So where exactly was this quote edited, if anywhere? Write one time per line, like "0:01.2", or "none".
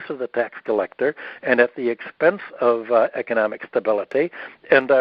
none